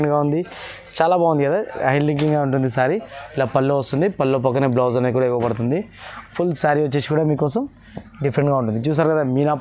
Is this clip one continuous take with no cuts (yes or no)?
yes